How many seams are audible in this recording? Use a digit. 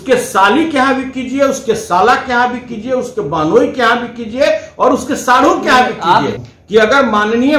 1